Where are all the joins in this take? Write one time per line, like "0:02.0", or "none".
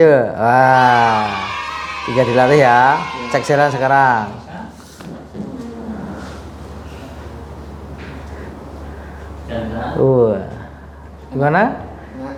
none